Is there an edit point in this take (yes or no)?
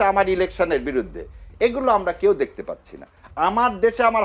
no